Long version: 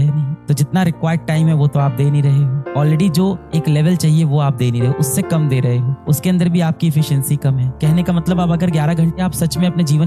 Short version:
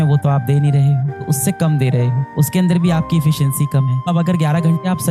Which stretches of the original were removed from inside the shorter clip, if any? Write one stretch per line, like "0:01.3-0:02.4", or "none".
0:02.7-0:04.9
0:07.8-0:08.4